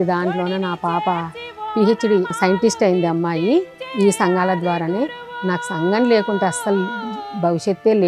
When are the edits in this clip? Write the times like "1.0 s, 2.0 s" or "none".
1.5 s, 2.3 s, 3.8 s